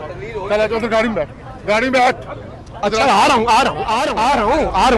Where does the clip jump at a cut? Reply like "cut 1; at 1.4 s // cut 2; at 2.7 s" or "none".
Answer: cut 1; at 4.1 s